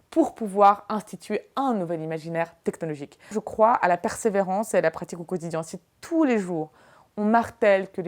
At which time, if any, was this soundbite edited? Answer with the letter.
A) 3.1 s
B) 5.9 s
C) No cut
A